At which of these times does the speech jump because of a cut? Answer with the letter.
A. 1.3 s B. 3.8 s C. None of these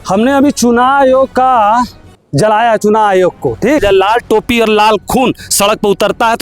B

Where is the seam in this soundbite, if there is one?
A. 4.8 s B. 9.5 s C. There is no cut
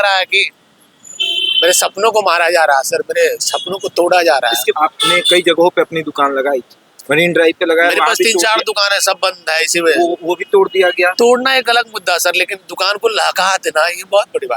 A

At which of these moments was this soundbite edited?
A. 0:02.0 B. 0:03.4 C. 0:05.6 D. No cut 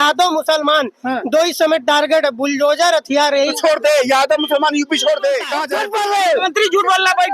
C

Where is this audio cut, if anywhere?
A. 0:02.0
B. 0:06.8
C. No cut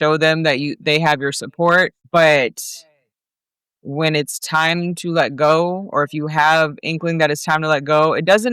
A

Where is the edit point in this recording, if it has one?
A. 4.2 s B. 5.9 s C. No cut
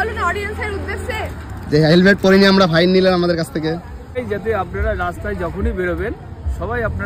A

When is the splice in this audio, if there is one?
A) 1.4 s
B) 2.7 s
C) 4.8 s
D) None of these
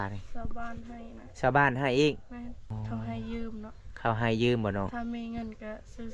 B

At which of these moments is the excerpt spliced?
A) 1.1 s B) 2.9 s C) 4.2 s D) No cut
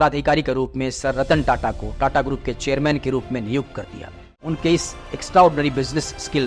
C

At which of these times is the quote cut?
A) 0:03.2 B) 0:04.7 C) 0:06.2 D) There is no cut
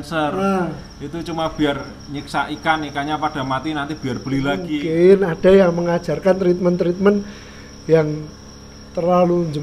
B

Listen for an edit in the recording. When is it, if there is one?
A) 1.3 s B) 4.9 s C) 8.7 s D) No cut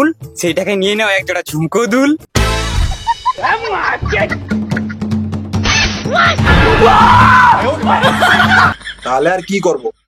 C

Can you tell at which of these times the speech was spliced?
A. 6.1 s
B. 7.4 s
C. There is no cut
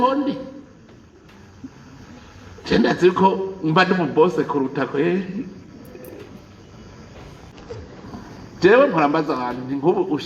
B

